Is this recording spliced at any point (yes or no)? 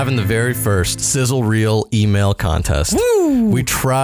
yes